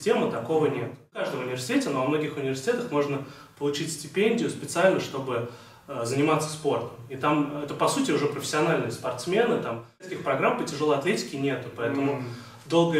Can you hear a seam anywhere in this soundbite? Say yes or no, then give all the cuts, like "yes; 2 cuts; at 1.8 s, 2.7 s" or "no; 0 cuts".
yes; 2 cuts; at 1.3 s, 10.1 s